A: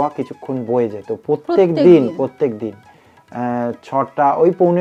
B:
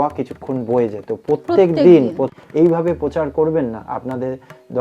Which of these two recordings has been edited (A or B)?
B